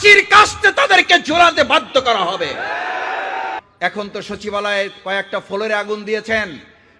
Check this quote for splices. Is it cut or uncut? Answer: cut